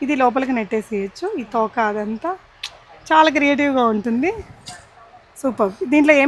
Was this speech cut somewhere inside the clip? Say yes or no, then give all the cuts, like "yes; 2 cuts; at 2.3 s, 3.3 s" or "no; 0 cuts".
no; 0 cuts